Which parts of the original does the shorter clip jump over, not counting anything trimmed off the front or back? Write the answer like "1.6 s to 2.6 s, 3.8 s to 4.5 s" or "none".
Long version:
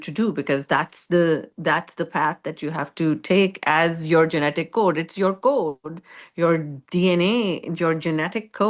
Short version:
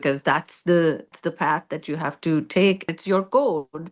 1.6 s to 1.9 s, 3.6 s to 5.0 s